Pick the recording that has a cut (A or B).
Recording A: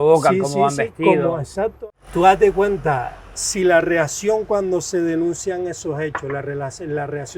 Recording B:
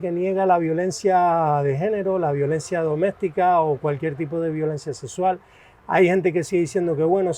A